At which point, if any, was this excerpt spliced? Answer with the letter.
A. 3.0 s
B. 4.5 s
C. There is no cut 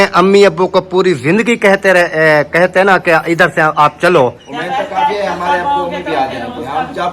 B